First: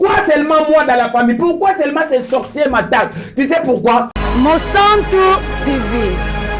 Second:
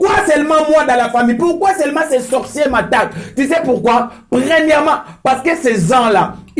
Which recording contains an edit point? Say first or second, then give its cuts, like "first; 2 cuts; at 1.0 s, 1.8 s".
first; 1 cut; at 4.2 s